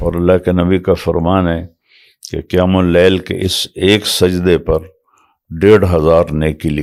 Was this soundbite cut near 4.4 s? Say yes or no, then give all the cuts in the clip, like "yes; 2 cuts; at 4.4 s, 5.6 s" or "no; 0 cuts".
no; 0 cuts